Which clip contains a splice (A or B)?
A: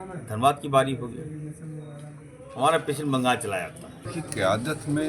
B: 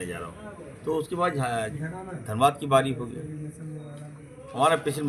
A